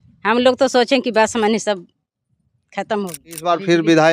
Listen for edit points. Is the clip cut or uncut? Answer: cut